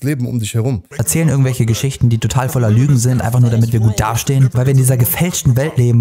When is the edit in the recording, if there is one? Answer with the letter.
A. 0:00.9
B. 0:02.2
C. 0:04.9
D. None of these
A